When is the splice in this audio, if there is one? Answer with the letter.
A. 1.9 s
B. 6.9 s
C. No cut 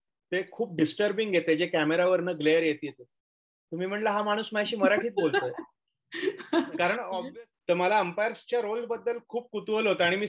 B